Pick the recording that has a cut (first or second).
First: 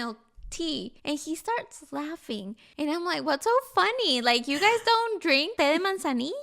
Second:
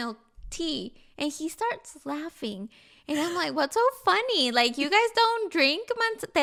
first